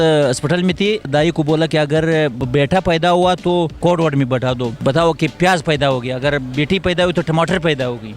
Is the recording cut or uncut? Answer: cut